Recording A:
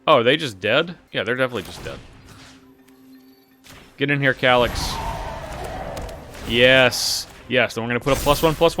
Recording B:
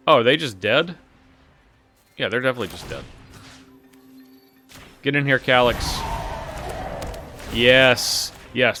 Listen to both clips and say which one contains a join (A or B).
A